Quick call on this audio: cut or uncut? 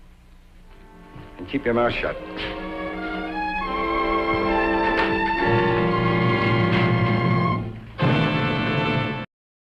uncut